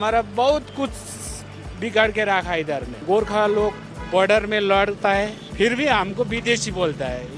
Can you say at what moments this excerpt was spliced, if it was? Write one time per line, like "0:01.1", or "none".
0:02.9
0:05.4